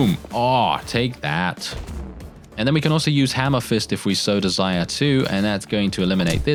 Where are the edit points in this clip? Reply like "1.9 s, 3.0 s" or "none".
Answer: none